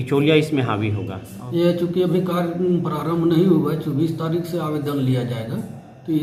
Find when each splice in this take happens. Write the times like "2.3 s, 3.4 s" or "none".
none

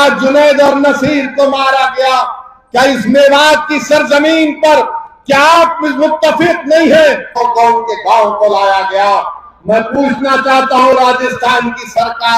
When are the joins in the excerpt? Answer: 7.3 s

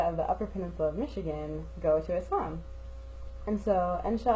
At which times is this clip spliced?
none

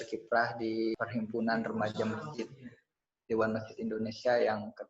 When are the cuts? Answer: 1.0 s

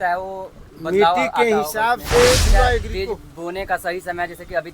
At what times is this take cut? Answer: 2.5 s

